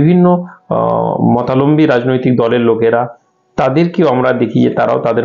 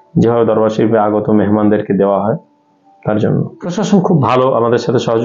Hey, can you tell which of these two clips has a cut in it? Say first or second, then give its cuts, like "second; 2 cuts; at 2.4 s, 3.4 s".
second; 1 cut; at 3.8 s